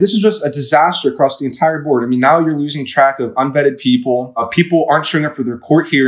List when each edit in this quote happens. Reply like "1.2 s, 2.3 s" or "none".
4.5 s